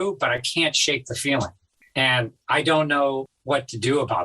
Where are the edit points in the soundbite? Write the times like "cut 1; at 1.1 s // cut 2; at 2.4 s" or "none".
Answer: cut 1; at 1.8 s // cut 2; at 3.3 s